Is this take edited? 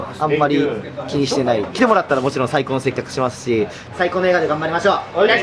yes; 2 cuts; at 1.7 s, 3.9 s

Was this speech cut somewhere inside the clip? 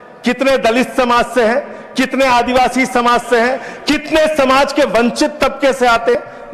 no; 0 cuts

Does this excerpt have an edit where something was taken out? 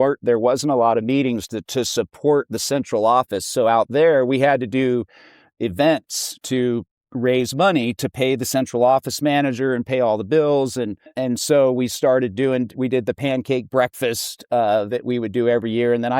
yes; 1 cut; at 11.1 s

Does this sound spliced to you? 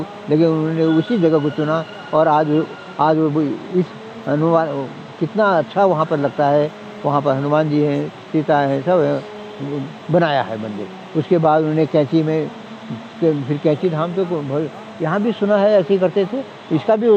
no; 0 cuts

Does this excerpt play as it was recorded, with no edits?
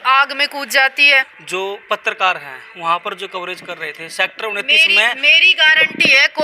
no; 1 cut; at 1.4 s

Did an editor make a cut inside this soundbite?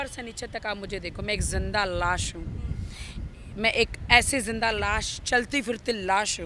no; 0 cuts

